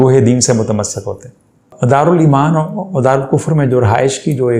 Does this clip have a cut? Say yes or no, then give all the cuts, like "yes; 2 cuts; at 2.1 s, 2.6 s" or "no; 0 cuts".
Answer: yes; 1 cut; at 1.6 s